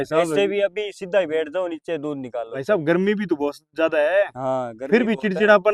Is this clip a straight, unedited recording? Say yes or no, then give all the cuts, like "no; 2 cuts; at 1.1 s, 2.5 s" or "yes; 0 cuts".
yes; 0 cuts